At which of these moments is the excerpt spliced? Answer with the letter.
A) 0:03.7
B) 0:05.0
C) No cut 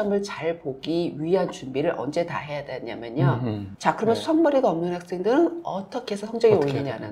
A